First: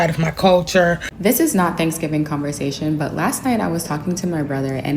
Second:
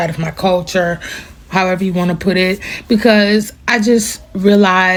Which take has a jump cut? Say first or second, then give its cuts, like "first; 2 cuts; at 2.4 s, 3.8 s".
first; 1 cut; at 1.1 s